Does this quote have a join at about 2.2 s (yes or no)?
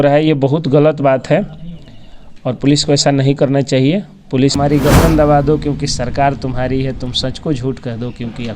no